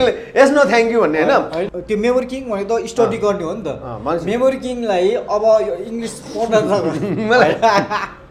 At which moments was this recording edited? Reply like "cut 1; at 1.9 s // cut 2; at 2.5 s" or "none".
cut 1; at 1.6 s